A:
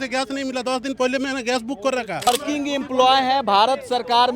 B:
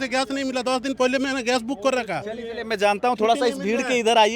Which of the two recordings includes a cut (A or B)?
A